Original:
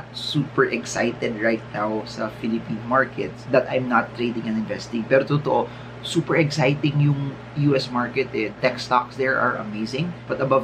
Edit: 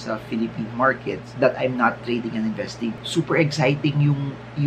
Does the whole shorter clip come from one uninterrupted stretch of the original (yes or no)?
no